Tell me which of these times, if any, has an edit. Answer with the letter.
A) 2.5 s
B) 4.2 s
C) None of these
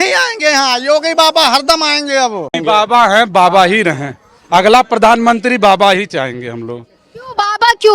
A